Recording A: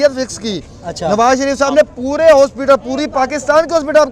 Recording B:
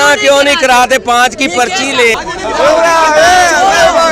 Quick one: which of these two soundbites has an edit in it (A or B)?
B